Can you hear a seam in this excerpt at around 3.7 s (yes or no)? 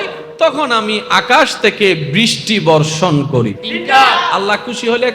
yes